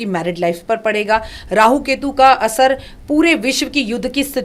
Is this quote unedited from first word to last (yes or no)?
yes